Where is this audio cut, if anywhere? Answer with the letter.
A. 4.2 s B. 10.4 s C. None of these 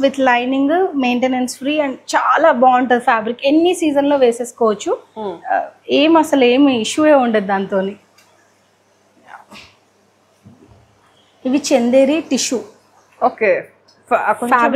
C